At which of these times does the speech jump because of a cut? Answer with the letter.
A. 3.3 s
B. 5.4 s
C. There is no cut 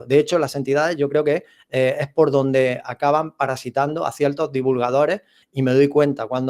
B